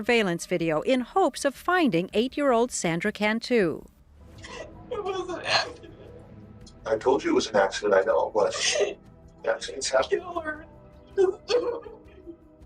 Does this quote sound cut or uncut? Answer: cut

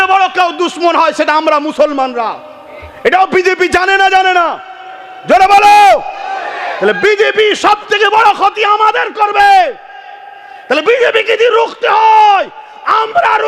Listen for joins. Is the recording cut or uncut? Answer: uncut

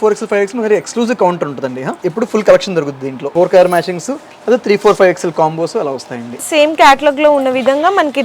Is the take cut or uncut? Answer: cut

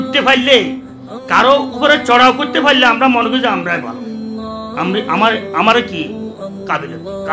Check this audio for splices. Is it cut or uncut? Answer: uncut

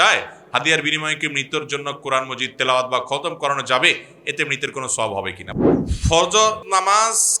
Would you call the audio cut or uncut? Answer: cut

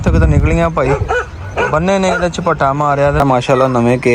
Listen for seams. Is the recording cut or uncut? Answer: cut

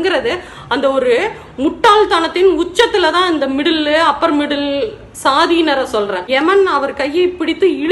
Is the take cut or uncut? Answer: cut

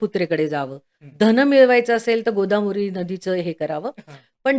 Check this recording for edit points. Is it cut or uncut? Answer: uncut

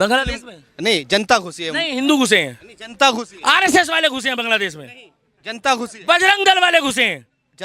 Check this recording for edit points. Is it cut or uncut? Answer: uncut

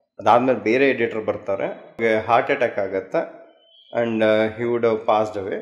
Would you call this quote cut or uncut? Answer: cut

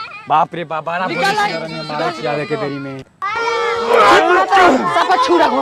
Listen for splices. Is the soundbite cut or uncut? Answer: cut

